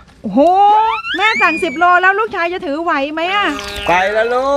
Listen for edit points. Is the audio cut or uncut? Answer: cut